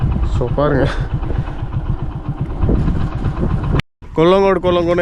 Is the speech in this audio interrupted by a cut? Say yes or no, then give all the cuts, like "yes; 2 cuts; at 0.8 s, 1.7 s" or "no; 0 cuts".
yes; 1 cut; at 4.0 s